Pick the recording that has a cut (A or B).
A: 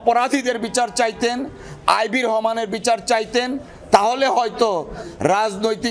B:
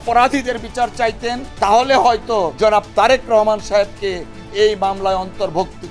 B